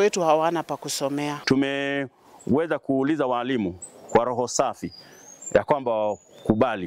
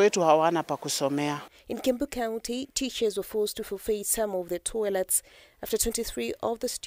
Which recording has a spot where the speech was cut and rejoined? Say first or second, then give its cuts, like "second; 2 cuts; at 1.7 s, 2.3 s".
first; 1 cut; at 1.4 s